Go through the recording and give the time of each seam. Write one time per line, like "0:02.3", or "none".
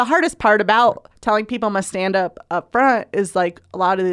0:01.1